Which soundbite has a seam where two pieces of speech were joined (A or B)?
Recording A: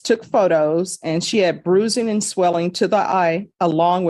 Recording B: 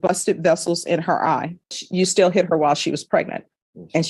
B